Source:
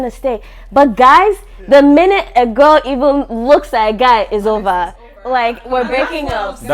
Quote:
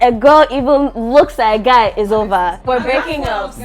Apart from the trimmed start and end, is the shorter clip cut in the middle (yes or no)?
yes